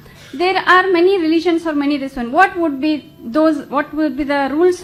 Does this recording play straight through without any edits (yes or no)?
yes